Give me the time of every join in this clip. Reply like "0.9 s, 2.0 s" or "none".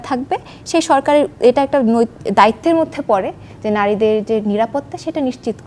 none